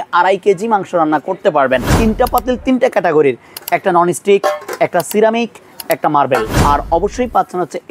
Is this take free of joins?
no; 2 cuts; at 1.9 s, 6.5 s

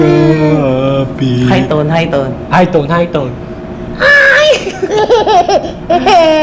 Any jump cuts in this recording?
no; 0 cuts

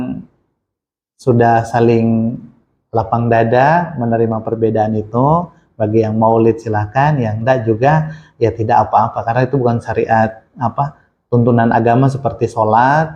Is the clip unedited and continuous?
yes; 0 cuts

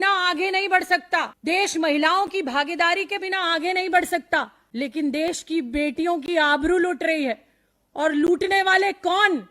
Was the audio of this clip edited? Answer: yes; 2 cuts; at 1.3 s, 4.6 s

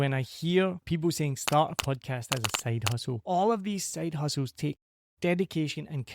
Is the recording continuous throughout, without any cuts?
no; 2 cuts; at 0.8 s, 3.2 s

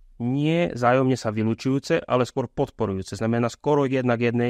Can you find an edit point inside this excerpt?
no; 0 cuts

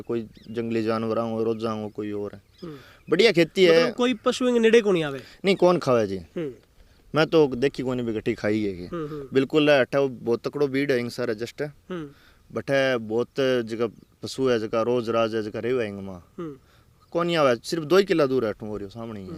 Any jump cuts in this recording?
no; 0 cuts

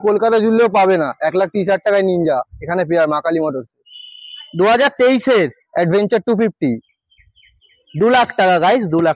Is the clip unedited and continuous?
yes; 0 cuts

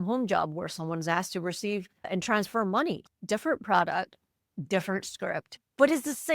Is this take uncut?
no; 1 cut; at 3.0 s

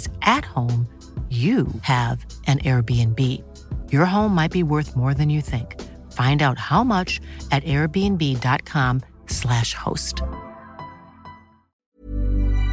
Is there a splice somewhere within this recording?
yes; 1 cut; at 11.7 s

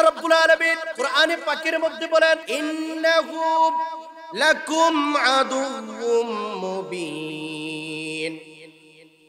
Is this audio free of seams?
no; 2 cuts; at 0.9 s, 2.5 s

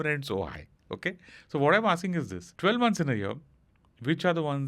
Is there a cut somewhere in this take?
yes; 1 cut; at 2.4 s

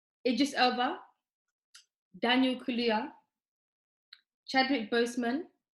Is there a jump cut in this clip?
no; 0 cuts

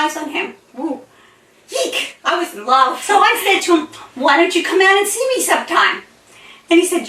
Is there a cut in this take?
yes; 1 cut; at 3.0 s

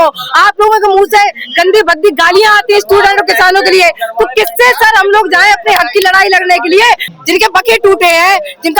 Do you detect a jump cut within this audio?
yes; 1 cut; at 7.1 s

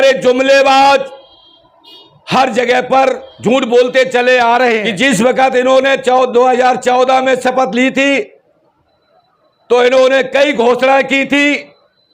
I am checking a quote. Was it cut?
yes; 1 cut; at 4.9 s

